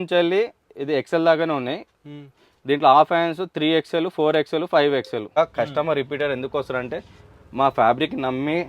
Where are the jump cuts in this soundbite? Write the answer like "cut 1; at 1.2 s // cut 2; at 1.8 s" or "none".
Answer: cut 1; at 5.4 s